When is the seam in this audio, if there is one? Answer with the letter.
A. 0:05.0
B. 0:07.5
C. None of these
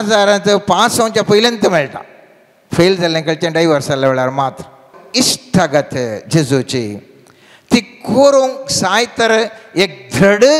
A